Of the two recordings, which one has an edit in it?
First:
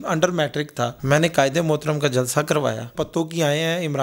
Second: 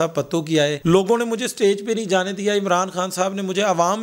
first; 2 cuts; at 1.0 s, 2.9 s

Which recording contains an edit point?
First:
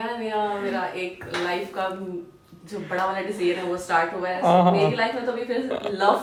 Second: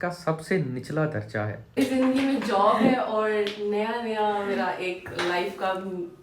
second; 1 cut; at 1.8 s

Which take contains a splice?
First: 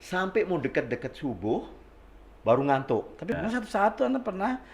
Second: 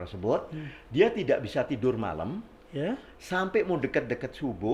first; 1 cut; at 3.3 s

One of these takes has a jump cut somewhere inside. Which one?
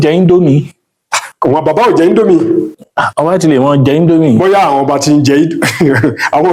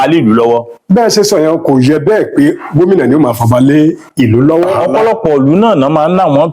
second; 1 cut; at 4.8 s

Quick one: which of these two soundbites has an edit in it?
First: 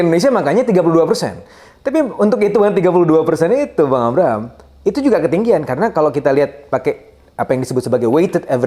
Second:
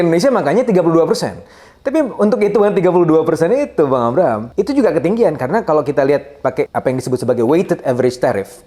second; 2 cuts; at 4.4 s, 6.7 s

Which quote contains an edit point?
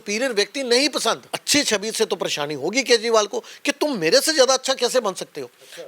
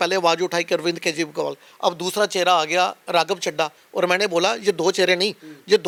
first; 1 cut; at 1.4 s

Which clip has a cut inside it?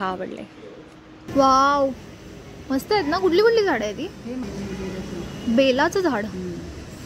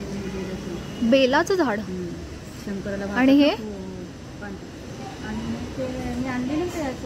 first; 1 cut; at 1.2 s

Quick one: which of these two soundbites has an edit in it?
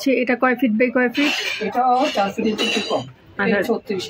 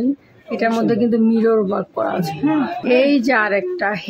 second; 1 cut; at 2.8 s

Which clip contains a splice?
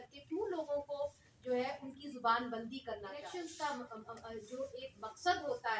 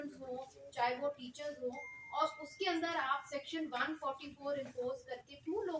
first; 1 cut; at 3.3 s

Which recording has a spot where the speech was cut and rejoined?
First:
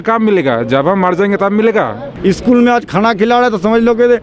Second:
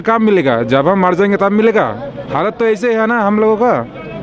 first; 1 cut; at 2.1 s

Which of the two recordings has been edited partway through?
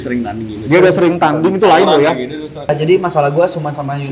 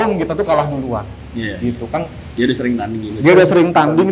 first; 1 cut; at 2.7 s

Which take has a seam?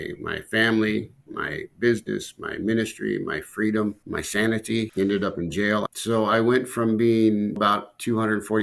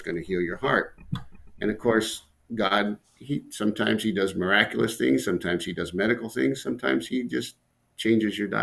first; 4 cuts; at 4.0 s, 4.9 s, 5.9 s, 7.6 s

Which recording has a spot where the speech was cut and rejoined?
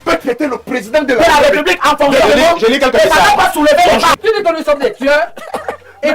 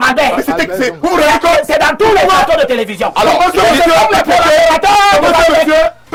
first; 1 cut; at 4.2 s

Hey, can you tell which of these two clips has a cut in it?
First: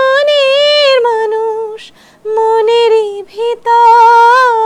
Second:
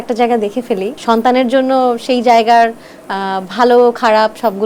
second; 1 cut; at 0.9 s

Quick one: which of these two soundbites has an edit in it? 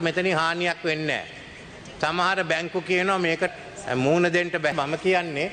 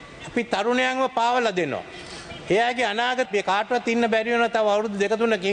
second; 1 cut; at 3.3 s

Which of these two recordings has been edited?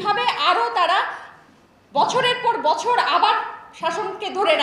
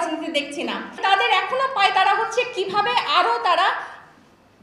second; 1 cut; at 1.0 s

